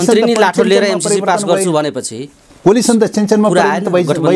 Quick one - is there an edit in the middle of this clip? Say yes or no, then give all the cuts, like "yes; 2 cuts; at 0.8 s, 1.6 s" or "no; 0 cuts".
no; 0 cuts